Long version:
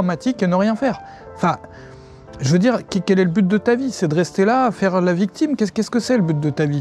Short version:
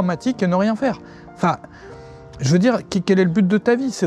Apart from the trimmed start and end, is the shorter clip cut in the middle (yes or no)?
no